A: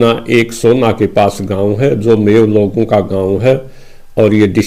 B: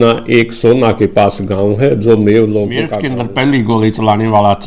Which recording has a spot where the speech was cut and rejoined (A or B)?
B